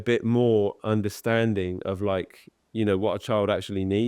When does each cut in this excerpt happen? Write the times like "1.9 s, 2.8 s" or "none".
none

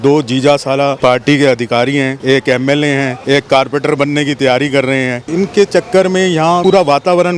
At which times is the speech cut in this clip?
1.0 s, 2.2 s, 3.2 s, 5.2 s, 6.6 s

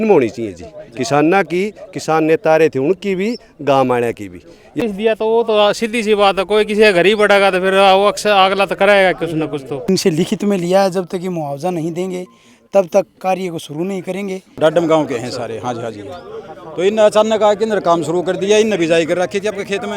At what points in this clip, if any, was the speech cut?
4.8 s, 9.9 s, 14.6 s

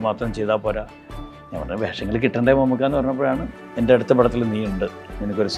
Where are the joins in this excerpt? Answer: none

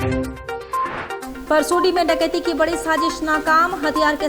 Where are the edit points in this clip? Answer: 1.3 s

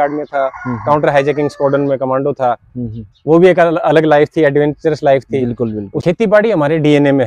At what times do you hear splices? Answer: 5.9 s

